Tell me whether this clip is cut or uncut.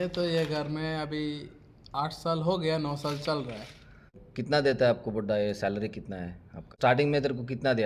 cut